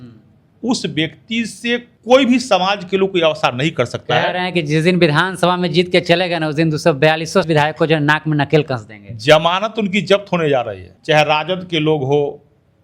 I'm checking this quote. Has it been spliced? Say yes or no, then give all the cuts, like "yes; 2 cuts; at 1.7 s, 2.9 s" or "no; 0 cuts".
yes; 3 cuts; at 1.9 s, 7.5 s, 10.9 s